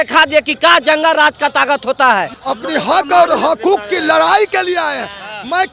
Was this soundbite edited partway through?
yes; 1 cut; at 2.3 s

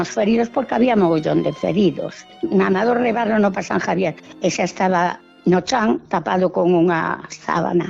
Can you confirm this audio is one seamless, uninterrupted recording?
no; 3 cuts; at 2.2 s, 4.3 s, 5.3 s

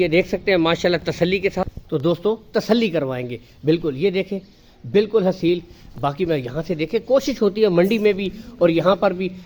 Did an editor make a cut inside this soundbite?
no; 0 cuts

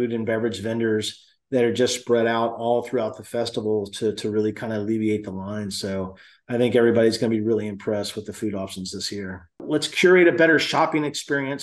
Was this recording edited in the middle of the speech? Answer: yes; 1 cut; at 9.6 s

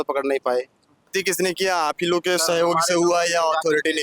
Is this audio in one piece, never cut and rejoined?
no; 1 cut; at 1.1 s

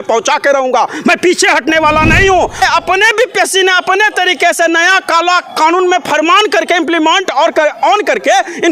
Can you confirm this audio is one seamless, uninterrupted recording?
no; 1 cut; at 2.6 s

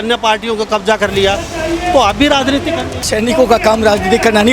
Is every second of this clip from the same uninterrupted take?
no; 1 cut; at 3.0 s

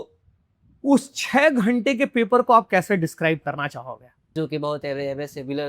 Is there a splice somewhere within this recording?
yes; 1 cut; at 4.3 s

